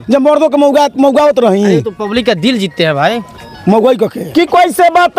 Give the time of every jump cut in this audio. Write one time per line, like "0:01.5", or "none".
0:04.2